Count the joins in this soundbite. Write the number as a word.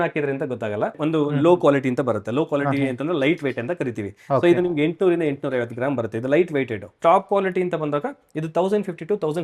two